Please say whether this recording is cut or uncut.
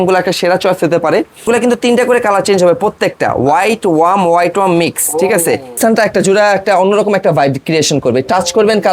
cut